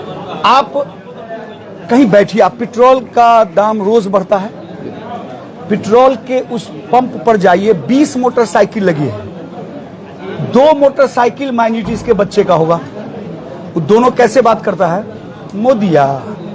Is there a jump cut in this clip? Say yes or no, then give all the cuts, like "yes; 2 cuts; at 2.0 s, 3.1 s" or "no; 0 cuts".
no; 0 cuts